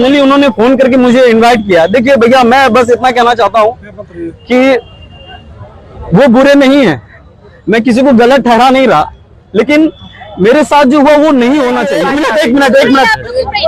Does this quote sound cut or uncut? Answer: cut